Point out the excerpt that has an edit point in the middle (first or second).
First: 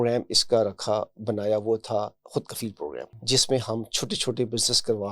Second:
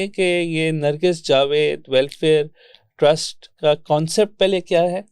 first